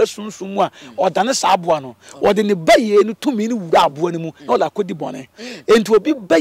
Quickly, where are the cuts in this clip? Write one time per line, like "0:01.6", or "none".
none